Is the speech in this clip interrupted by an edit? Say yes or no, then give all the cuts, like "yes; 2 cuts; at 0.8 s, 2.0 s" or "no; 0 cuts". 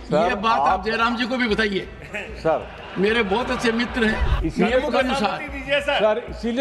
yes; 1 cut; at 4.4 s